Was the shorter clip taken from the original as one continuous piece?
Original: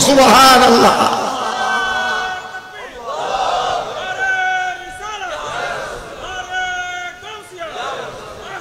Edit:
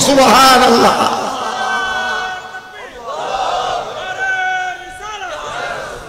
yes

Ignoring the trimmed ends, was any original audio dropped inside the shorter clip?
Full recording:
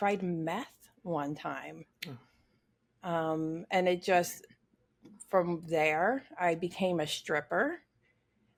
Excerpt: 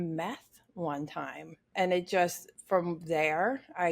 yes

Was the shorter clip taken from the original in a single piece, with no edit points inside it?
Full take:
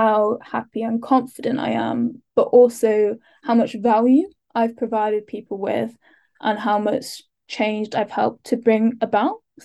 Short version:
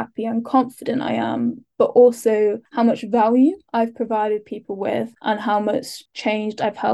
no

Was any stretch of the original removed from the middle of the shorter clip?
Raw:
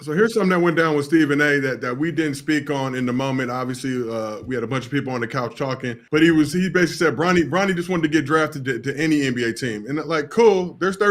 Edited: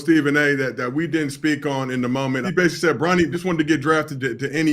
yes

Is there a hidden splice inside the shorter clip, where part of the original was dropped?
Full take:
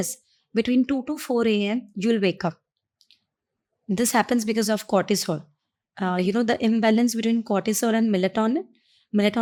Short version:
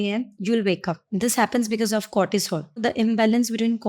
yes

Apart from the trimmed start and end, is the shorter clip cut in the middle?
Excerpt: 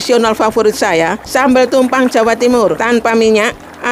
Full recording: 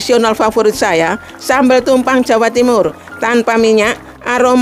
yes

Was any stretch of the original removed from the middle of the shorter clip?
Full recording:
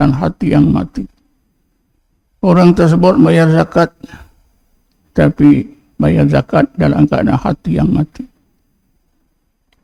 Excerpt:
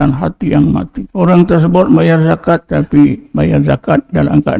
yes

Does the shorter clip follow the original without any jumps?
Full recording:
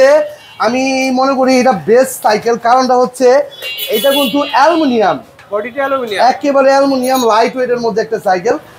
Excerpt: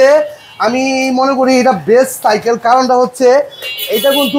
yes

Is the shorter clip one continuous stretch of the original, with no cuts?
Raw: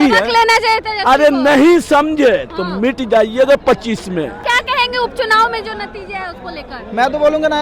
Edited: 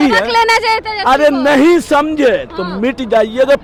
yes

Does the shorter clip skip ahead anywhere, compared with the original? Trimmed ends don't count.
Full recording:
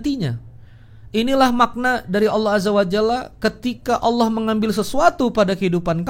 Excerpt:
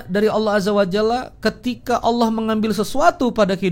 no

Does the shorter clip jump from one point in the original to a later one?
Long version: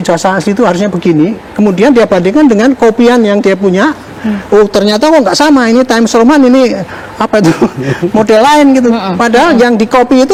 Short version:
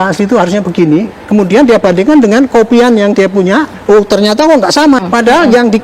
yes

